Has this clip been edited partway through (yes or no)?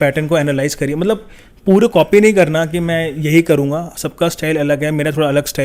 no